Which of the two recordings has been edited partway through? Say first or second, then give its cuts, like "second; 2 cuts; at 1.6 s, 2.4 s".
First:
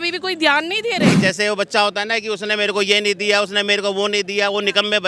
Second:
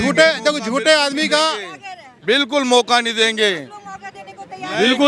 first; 1 cut; at 1.1 s